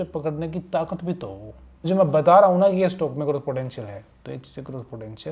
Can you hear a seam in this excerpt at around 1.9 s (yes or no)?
yes